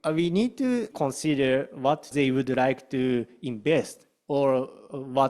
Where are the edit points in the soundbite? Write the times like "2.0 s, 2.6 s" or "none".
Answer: 0.9 s, 2.1 s